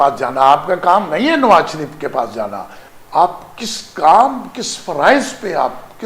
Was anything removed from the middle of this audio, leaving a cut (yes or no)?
yes